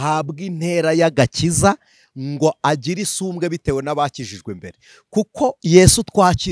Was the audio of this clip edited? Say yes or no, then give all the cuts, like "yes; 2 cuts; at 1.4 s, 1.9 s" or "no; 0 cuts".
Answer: no; 0 cuts